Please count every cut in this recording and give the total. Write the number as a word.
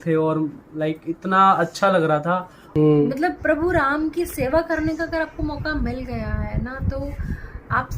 one